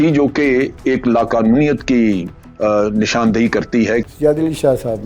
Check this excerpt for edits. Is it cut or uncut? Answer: cut